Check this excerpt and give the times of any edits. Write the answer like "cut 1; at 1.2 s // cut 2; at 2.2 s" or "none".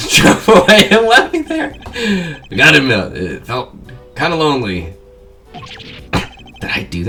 none

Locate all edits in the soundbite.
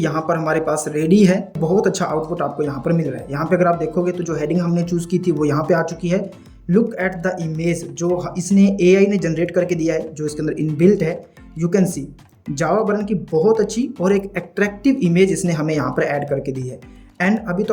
cut 1; at 1.6 s

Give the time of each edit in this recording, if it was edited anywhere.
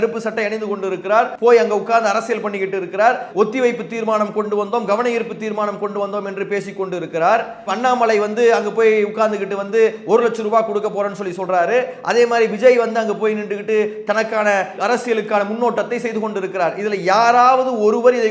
cut 1; at 1.3 s

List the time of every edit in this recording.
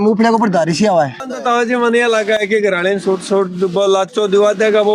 cut 1; at 1.3 s

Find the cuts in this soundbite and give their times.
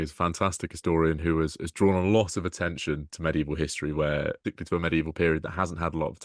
cut 1; at 4.5 s

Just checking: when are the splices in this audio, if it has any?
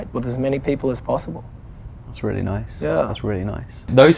none

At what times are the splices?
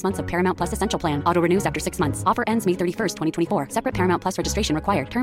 none

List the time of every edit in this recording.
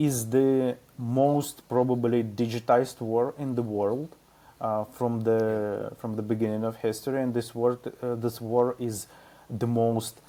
none

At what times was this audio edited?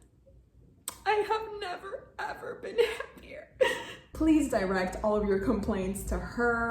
cut 1; at 4.1 s

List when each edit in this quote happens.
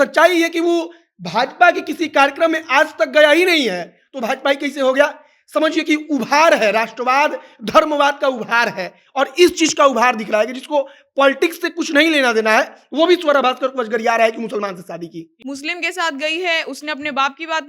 cut 1; at 15.3 s

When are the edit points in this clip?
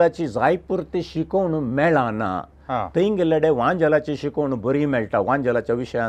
none

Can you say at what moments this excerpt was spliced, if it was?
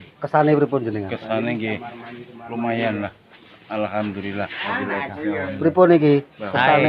cut 1; at 4.7 s

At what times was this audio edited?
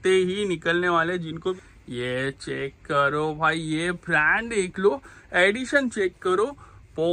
cut 1; at 1.6 s

